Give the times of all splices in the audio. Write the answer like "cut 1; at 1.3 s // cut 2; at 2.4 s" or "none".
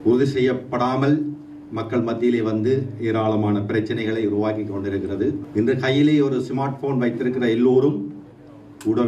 cut 1; at 5.4 s